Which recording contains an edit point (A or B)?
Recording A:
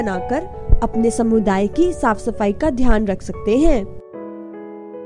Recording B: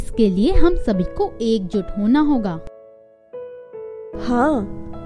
A